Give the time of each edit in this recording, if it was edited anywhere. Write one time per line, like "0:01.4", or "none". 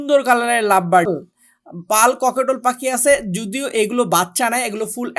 0:01.1